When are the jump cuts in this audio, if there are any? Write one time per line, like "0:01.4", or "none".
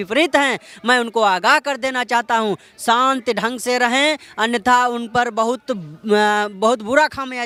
none